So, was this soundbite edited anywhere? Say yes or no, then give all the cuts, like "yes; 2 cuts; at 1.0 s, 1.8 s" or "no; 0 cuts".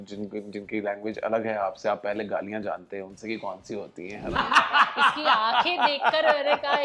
yes; 1 cut; at 4.3 s